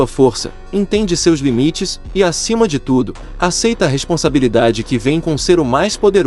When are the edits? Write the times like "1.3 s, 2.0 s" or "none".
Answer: none